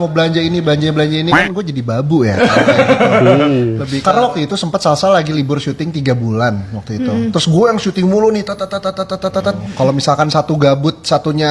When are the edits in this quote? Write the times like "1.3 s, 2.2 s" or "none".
3.9 s, 9.7 s